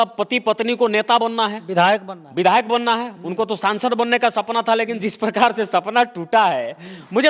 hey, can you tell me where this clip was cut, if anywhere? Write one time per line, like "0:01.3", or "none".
none